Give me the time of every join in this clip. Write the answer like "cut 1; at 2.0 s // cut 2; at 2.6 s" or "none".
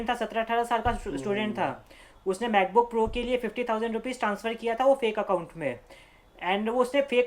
none